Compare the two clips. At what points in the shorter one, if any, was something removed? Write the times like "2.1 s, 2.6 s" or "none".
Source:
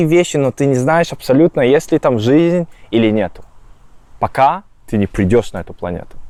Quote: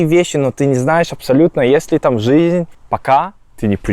2.8 s